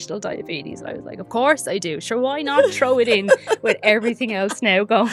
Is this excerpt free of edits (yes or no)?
yes